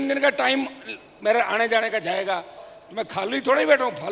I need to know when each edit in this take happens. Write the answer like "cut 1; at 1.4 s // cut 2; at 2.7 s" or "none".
cut 1; at 2.7 s